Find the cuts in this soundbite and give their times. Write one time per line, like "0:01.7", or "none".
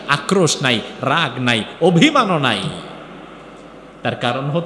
none

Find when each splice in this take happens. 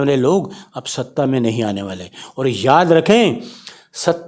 none

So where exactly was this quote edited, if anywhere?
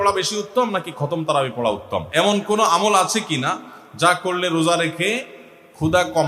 0:02.1

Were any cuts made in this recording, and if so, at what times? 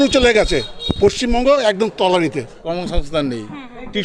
0:02.5

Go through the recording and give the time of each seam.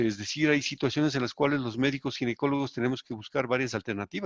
none

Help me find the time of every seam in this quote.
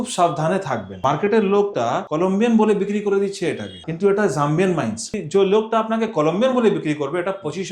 0:00.9
0:02.0
0:03.8
0:05.2

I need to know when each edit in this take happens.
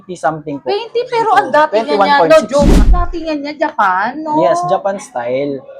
0:02.8

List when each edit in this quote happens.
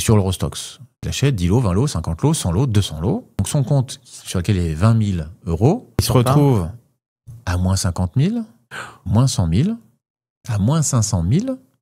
0:01.1
0:03.4
0:06.0

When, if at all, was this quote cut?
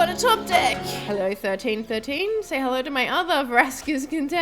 0:00.9

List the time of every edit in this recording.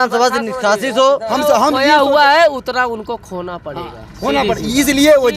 0:01.3

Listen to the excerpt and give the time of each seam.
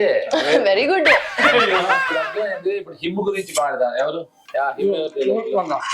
0:02.2
0:04.4

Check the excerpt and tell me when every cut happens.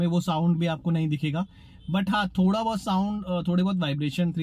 none

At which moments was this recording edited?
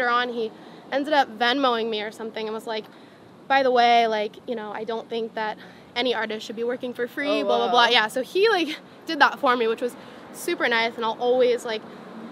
none

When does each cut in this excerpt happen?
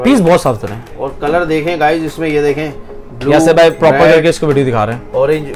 none

